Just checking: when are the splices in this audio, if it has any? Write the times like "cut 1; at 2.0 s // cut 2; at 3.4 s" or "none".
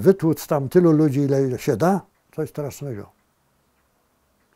cut 1; at 2.2 s

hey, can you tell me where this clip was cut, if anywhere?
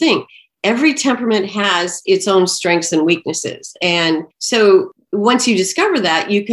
cut 1; at 4.3 s // cut 2; at 4.9 s

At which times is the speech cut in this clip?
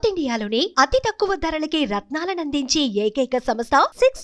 none

